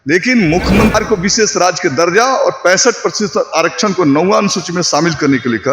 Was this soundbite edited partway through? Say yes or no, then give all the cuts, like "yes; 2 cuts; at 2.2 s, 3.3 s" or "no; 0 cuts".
yes; 1 cut; at 0.9 s